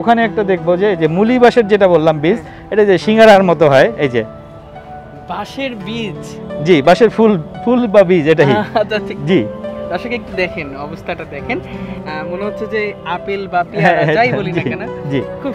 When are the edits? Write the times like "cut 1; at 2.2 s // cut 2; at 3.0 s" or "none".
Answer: none

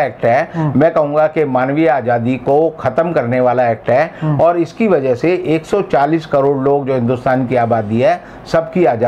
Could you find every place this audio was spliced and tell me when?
none

